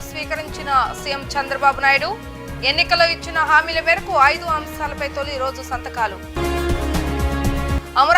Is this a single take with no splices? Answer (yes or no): yes